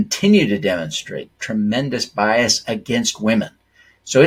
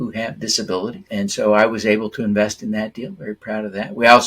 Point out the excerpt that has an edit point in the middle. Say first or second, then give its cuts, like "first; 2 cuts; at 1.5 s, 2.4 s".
second; 1 cut; at 1.0 s